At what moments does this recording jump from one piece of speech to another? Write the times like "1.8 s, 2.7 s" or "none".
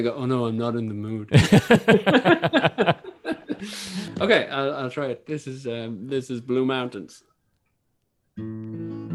4.1 s